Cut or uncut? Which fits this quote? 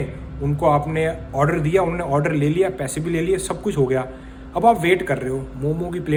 uncut